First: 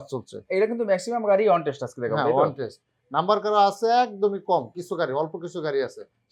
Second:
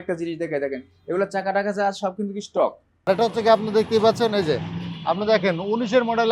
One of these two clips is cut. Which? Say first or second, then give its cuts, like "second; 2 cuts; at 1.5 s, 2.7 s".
second; 1 cut; at 2.9 s